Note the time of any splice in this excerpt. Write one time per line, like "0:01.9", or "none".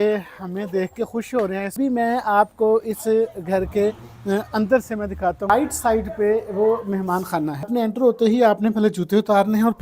0:01.8
0:05.5
0:07.7